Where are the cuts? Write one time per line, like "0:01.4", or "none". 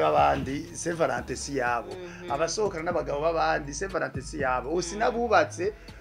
none